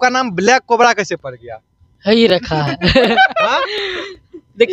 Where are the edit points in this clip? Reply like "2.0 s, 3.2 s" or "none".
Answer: none